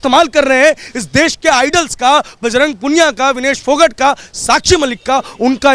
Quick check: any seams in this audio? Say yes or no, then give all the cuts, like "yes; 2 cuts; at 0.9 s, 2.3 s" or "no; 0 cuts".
no; 0 cuts